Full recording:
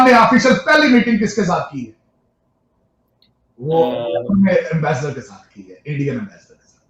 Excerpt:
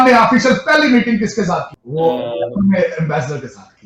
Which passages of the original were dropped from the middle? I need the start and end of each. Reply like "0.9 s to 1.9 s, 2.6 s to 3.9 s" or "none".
1.8 s to 3.5 s